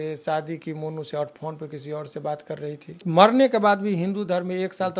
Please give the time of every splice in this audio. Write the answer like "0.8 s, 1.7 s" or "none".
3.0 s

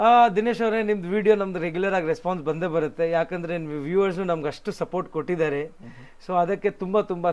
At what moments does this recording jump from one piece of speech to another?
none

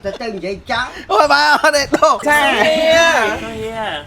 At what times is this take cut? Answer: 2.2 s

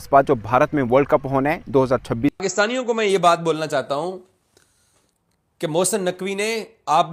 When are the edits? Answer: 2.4 s

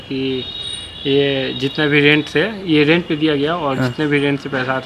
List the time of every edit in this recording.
none

